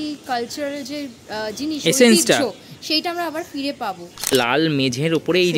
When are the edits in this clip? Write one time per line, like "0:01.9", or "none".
0:04.3